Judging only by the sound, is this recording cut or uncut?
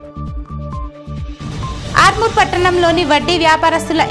uncut